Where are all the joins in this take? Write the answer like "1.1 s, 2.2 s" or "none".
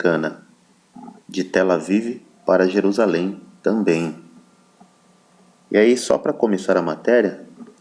2.0 s